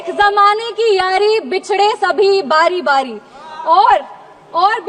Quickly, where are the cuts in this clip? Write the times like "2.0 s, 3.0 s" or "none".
none